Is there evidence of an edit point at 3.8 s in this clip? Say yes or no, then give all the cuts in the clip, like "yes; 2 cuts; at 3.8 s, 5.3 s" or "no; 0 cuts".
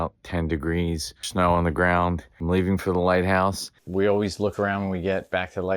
yes; 1 cut; at 3.8 s